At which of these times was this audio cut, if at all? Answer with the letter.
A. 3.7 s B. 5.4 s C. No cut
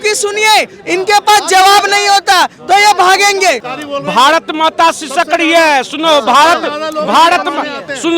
A